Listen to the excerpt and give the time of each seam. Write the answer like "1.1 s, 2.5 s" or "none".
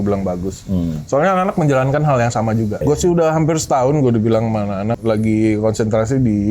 2.8 s, 5.0 s